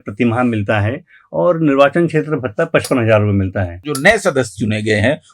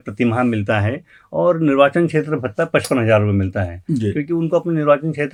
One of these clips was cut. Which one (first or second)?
first